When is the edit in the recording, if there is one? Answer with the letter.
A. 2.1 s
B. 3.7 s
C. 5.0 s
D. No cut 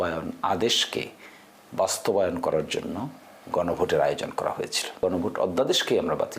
C